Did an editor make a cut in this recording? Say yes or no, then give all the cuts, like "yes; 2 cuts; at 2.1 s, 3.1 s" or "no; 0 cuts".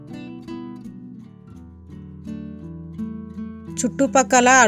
no; 0 cuts